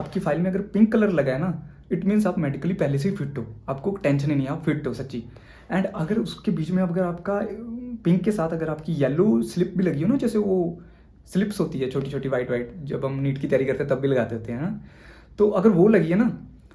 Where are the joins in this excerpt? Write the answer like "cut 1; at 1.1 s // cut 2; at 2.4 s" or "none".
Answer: none